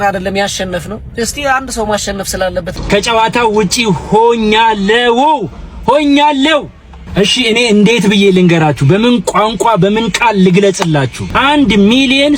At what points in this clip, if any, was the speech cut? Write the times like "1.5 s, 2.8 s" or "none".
2.8 s, 11.2 s